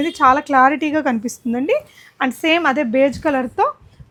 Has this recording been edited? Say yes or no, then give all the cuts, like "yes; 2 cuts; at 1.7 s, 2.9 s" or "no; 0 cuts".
no; 0 cuts